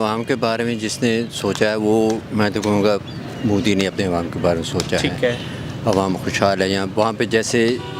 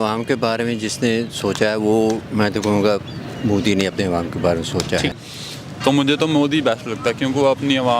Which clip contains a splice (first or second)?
second